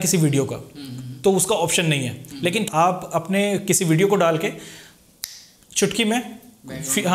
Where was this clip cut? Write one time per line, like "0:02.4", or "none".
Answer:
0:02.7